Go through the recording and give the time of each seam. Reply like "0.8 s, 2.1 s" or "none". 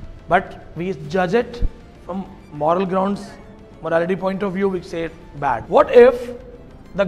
5.6 s